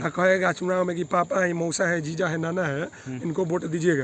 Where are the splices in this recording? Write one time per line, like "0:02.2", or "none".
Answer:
none